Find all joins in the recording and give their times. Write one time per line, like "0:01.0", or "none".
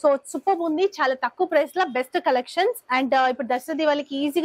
none